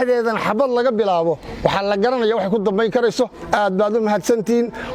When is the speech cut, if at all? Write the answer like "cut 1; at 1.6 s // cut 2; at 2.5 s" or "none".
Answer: none